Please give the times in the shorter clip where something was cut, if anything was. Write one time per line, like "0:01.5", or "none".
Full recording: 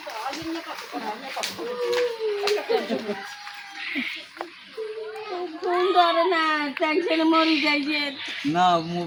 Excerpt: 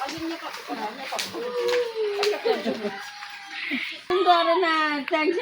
0:04.1